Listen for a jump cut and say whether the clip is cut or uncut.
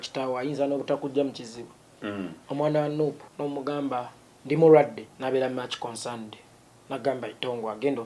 cut